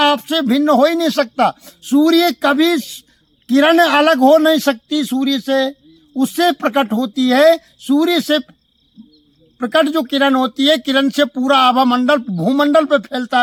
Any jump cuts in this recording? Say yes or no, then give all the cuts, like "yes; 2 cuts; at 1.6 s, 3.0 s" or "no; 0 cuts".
no; 0 cuts